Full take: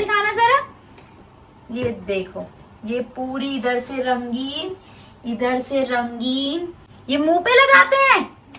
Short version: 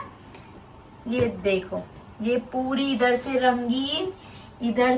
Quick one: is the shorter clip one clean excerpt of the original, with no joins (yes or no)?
yes